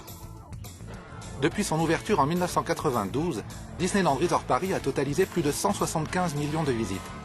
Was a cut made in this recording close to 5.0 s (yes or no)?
no